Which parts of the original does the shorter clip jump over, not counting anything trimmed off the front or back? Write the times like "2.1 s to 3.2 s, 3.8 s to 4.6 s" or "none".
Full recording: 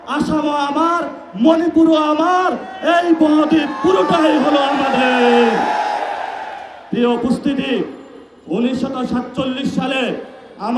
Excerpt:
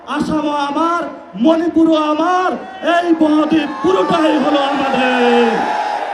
none